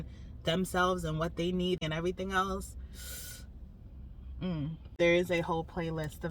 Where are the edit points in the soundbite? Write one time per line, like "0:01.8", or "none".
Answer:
0:01.8
0:04.9